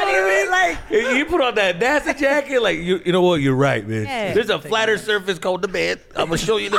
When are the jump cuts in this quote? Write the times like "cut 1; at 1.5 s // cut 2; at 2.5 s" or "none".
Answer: cut 1; at 4.2 s